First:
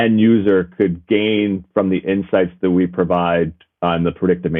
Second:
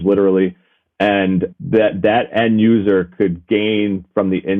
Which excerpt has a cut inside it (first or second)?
second